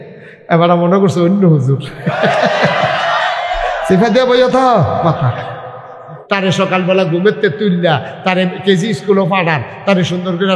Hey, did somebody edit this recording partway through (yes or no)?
yes